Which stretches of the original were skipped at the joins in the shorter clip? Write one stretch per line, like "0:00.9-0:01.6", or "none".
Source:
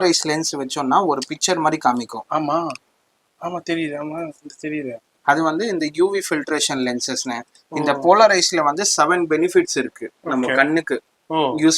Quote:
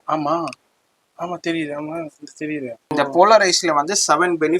0:05.1-0:07.8